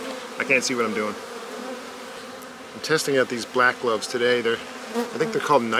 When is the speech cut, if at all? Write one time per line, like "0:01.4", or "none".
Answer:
0:02.2